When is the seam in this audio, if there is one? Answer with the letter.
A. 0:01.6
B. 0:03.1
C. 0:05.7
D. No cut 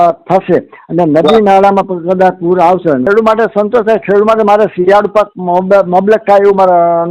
B